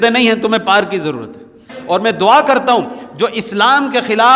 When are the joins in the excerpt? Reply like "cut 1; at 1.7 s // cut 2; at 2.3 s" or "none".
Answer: cut 1; at 1.7 s